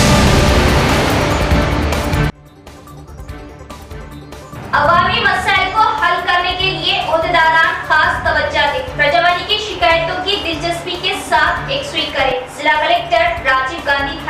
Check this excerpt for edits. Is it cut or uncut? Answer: uncut